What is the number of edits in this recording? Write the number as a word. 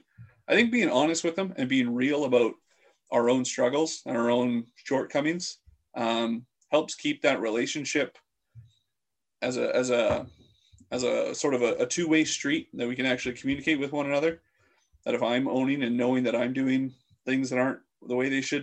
zero